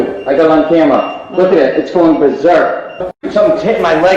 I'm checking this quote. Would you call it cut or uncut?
cut